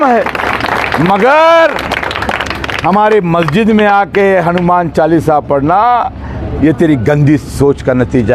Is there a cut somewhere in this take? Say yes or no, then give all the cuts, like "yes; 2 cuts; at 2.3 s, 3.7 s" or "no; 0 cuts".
no; 0 cuts